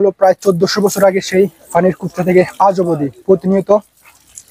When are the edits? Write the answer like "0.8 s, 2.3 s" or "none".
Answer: none